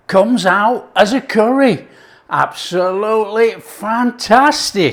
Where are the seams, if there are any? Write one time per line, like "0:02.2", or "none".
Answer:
none